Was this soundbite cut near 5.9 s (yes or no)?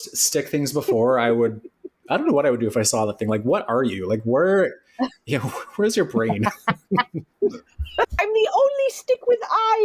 no